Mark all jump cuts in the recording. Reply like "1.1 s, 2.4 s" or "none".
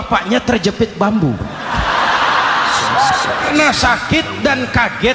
3.5 s